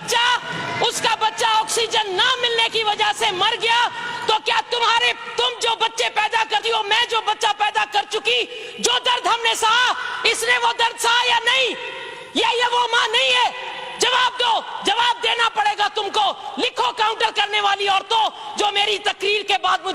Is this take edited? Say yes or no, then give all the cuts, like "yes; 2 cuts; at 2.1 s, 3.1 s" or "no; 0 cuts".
no; 0 cuts